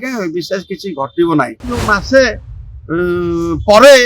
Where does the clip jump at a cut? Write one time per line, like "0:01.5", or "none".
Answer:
0:01.8